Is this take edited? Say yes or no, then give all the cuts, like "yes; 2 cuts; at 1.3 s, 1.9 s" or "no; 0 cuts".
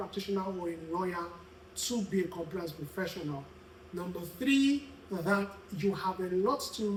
no; 0 cuts